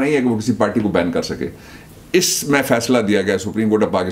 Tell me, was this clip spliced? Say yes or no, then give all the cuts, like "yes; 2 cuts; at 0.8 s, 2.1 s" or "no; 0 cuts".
no; 0 cuts